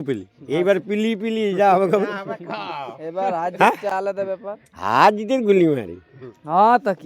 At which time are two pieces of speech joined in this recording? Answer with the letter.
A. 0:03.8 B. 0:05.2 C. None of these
C